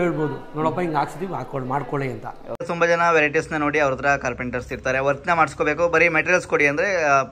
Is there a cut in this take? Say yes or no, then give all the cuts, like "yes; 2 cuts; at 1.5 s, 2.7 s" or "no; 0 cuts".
yes; 1 cut; at 2.5 s